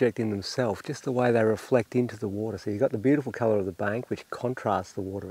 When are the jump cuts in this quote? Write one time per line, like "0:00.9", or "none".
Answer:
none